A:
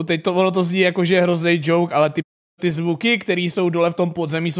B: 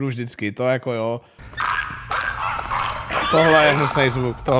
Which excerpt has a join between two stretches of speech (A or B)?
B